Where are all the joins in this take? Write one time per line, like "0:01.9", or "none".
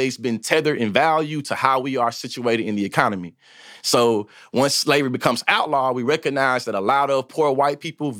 none